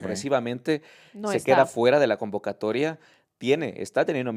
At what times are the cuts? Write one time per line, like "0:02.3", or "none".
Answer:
none